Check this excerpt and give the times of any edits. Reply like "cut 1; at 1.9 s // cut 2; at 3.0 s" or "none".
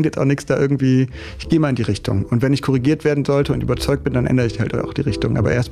none